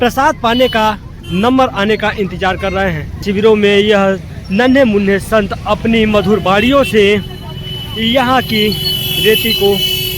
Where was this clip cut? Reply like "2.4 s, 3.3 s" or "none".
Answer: 3.2 s

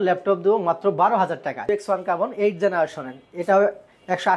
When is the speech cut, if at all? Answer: 1.7 s

